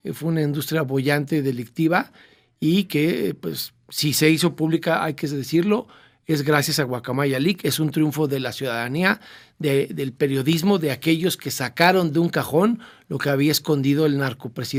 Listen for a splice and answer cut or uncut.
uncut